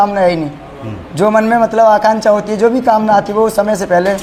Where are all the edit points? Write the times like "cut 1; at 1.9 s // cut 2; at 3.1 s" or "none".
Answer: none